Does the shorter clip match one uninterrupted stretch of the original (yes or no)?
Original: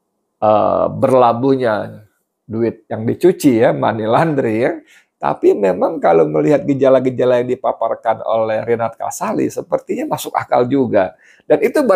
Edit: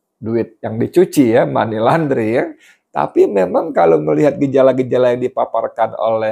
yes